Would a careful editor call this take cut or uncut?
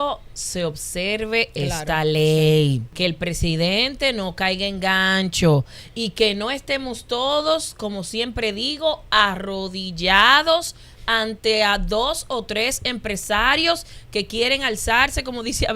cut